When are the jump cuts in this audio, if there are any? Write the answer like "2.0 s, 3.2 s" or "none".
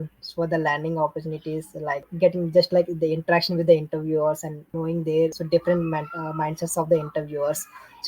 2.1 s, 4.6 s, 5.4 s